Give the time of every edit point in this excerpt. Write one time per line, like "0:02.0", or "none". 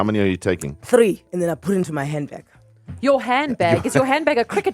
0:01.2